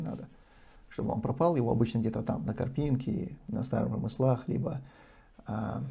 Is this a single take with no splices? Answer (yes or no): yes